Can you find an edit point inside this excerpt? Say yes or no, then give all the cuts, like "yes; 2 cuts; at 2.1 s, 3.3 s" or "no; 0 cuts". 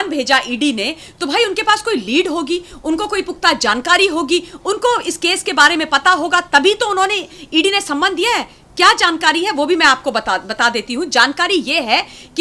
no; 0 cuts